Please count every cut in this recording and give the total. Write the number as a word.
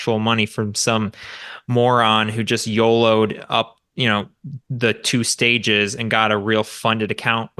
zero